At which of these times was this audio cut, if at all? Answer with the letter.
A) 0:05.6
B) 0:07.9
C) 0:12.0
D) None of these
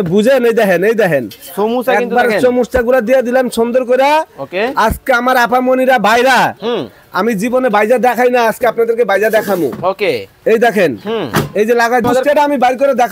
C